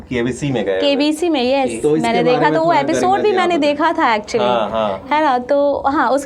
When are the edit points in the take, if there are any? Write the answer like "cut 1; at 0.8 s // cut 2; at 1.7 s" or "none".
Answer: none

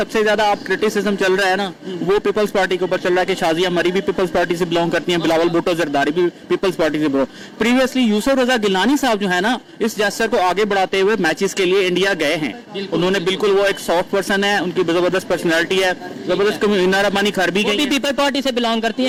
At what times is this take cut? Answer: none

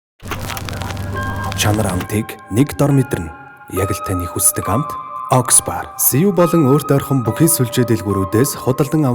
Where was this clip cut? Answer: cut 1; at 1.0 s

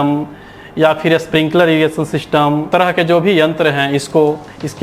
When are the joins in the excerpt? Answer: cut 1; at 2.7 s

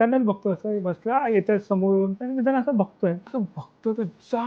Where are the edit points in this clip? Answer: cut 1; at 2.2 s // cut 2; at 3.2 s

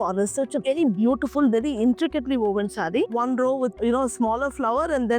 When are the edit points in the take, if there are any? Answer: cut 1; at 3.1 s

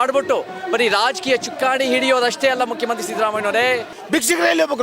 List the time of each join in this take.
cut 1; at 3.9 s

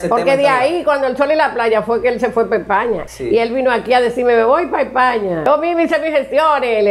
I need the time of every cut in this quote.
cut 1; at 3.0 s // cut 2; at 5.5 s

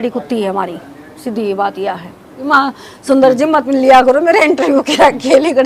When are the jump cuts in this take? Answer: cut 1; at 2.3 s

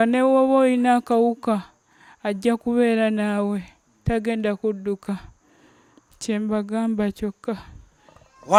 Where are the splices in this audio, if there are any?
none

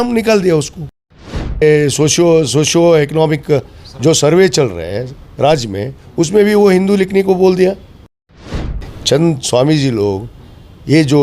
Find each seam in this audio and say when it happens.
cut 1; at 1.5 s // cut 2; at 8.4 s

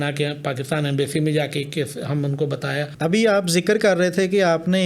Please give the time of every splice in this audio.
cut 1; at 2.9 s

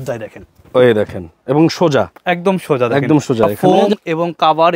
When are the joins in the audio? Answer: cut 1; at 3.5 s

